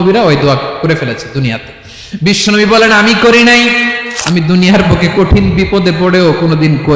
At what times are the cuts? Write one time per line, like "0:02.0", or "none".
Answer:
0:04.1